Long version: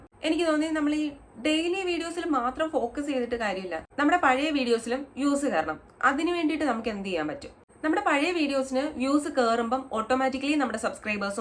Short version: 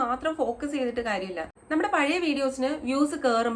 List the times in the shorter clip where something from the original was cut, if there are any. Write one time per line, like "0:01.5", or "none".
0:01.4

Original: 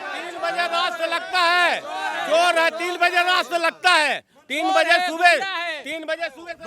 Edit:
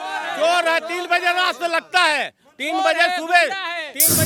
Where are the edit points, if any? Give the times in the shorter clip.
none

